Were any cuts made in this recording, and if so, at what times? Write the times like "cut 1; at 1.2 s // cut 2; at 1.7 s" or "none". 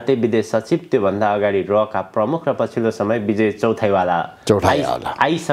none